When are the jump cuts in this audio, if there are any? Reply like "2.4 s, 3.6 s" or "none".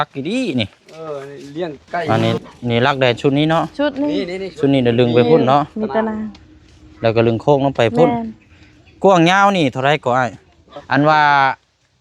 2.1 s, 10.7 s